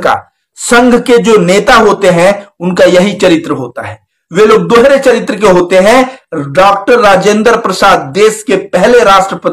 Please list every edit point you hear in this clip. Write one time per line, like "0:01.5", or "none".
none